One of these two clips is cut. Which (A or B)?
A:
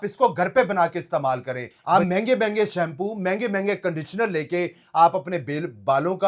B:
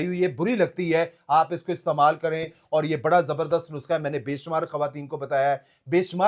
B